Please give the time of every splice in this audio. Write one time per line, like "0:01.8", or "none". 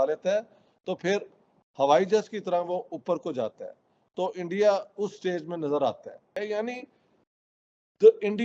0:06.3